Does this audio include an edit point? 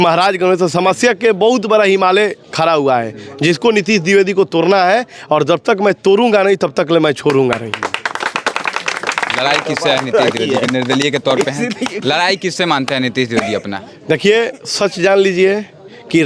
no; 0 cuts

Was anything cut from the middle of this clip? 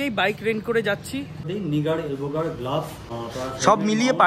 yes; 2 cuts; at 1.4 s, 3.1 s

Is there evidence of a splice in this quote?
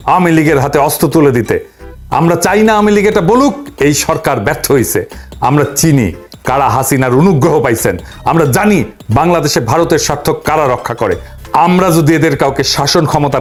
no; 0 cuts

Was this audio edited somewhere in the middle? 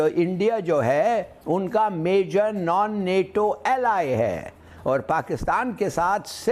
no; 0 cuts

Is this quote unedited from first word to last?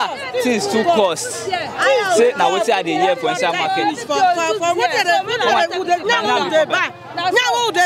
yes; 0 cuts

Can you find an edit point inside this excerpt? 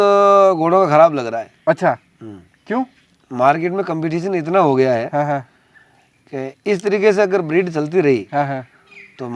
no; 0 cuts

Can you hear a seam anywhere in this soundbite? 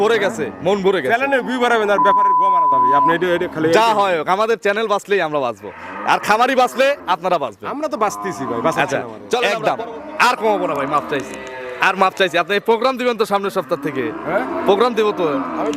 yes; 1 cut; at 9.4 s

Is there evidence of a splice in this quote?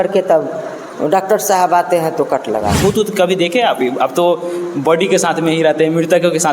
yes; 1 cut; at 2.8 s

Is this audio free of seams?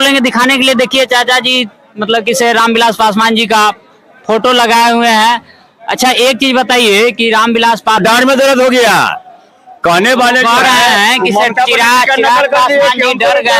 no; 1 cut; at 8.0 s

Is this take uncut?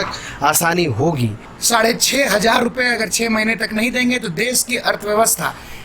no; 1 cut; at 1.5 s

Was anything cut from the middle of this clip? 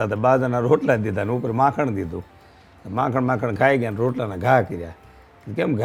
no; 0 cuts

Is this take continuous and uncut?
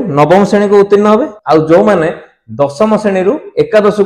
no; 1 cut; at 1.3 s

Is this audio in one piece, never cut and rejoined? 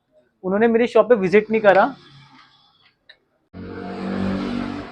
no; 1 cut; at 3.5 s

